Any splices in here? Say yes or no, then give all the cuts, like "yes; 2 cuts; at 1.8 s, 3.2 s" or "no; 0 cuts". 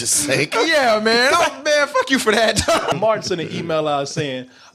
yes; 1 cut; at 2.9 s